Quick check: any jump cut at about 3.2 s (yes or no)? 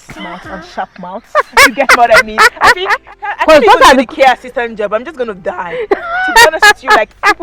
yes